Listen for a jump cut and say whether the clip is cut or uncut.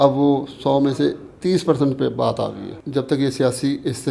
cut